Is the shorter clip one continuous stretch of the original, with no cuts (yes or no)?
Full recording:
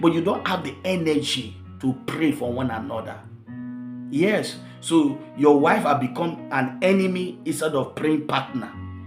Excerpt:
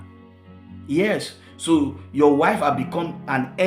yes